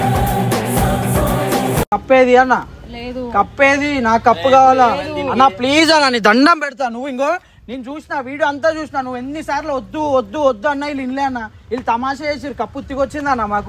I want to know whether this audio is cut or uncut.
uncut